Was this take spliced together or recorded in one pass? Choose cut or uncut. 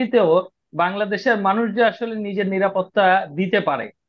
uncut